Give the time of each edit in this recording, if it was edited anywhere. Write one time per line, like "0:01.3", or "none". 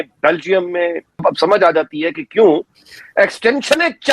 0:01.2